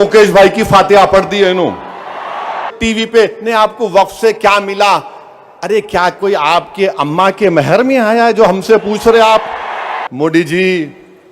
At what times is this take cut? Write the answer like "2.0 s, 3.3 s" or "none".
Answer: 2.7 s, 10.0 s